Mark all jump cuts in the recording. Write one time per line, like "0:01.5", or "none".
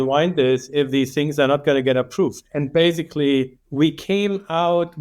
none